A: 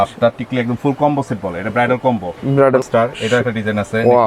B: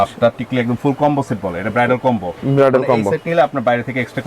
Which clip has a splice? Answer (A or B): A